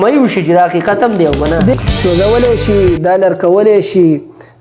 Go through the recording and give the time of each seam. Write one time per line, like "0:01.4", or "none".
0:01.7

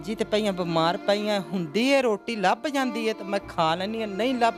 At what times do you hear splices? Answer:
none

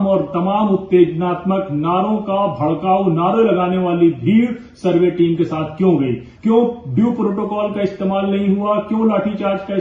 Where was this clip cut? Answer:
0:06.3

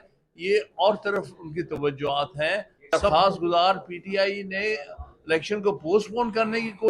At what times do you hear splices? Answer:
0:03.0

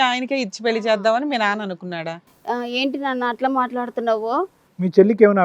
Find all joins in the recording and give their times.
none

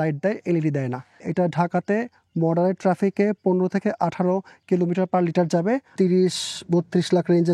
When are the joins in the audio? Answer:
0:01.2
0:05.9

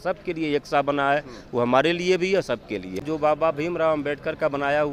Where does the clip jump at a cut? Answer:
0:03.0

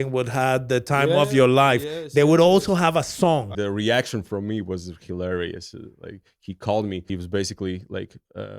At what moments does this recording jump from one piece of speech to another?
0:03.5
0:07.0

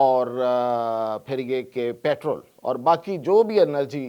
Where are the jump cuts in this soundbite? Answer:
0:02.5

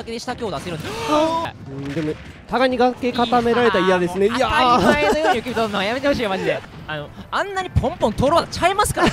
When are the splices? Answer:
0:01.5
0:06.6

